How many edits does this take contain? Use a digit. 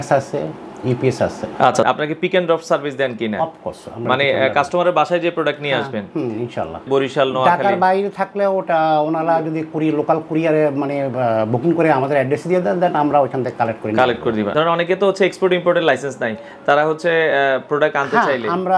3